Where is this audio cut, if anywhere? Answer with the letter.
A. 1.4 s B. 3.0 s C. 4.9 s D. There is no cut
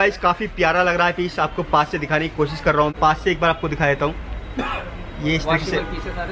B